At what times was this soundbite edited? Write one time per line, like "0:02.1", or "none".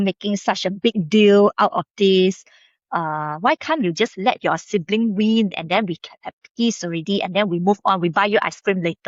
none